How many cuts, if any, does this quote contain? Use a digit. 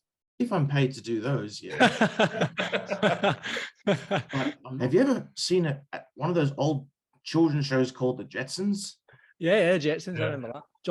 1